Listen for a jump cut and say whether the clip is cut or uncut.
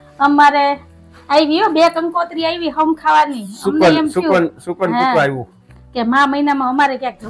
uncut